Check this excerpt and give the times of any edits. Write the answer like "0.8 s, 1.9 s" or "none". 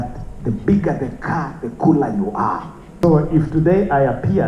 3.0 s